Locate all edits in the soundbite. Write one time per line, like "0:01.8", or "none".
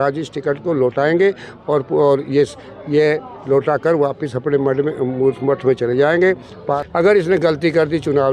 0:06.8